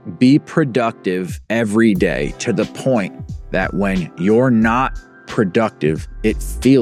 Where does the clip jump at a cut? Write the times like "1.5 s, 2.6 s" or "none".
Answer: none